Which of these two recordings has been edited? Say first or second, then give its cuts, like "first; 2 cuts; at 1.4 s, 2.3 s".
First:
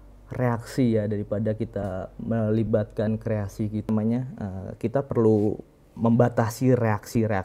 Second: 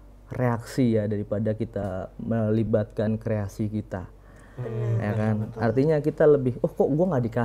first; 1 cut; at 3.9 s